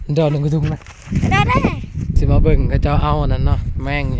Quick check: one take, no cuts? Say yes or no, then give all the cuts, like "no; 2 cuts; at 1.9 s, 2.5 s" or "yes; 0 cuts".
no; 1 cut; at 2.1 s